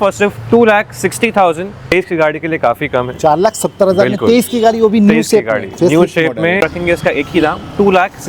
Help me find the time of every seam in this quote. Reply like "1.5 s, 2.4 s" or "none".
1.8 s, 6.6 s